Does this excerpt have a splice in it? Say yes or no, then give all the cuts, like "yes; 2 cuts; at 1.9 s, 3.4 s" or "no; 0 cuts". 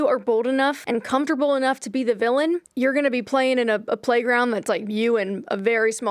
yes; 2 cuts; at 0.8 s, 2.7 s